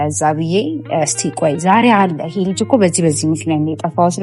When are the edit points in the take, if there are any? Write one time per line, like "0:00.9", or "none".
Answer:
none